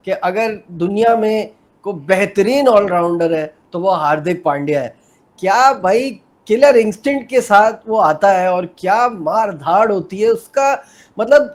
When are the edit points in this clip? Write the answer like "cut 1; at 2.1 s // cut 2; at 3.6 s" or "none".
none